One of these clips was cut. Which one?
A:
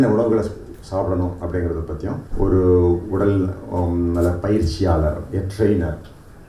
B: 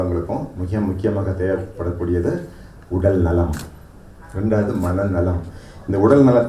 A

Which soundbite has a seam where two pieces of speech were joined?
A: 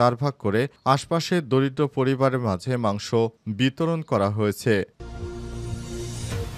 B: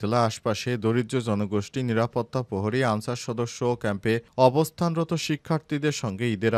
A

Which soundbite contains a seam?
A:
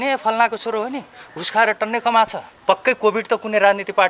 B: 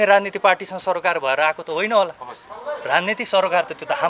A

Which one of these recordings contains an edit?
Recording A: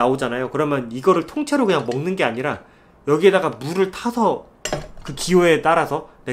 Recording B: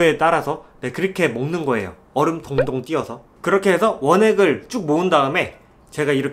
B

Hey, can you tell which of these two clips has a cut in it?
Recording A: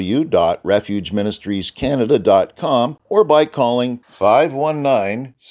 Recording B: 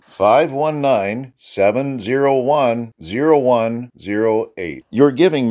A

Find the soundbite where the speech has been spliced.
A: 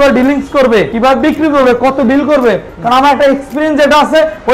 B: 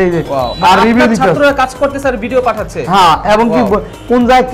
A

